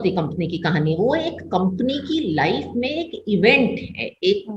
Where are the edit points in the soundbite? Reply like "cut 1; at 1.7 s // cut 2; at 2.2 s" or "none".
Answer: none